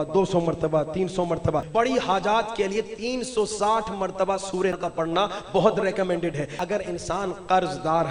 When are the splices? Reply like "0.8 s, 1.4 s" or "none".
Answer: 1.7 s, 4.8 s, 6.5 s

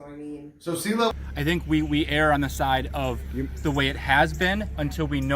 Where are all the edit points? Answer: 1.1 s

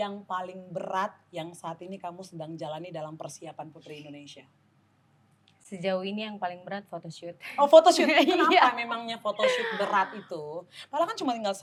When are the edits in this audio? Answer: none

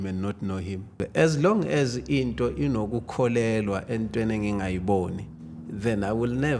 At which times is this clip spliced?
1.0 s

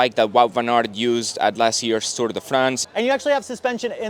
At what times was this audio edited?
2.8 s

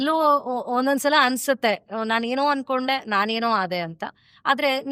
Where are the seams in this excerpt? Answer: none

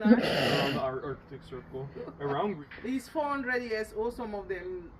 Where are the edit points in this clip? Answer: 2.6 s

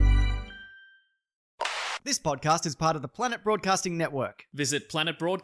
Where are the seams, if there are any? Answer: 1.5 s

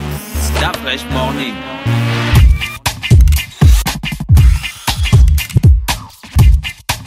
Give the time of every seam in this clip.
none

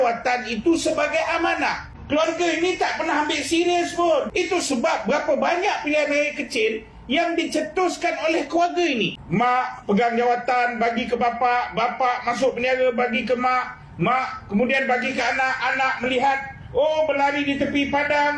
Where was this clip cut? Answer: 1.9 s, 4.3 s, 9.2 s

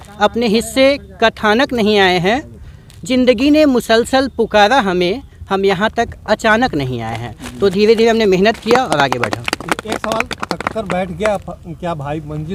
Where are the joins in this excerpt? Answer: none

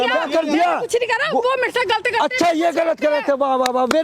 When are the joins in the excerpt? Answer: none

